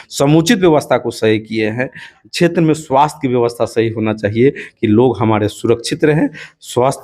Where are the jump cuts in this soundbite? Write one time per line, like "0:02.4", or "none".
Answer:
0:02.2